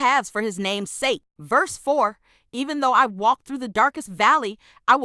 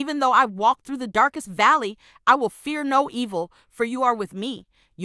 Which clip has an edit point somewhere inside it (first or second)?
first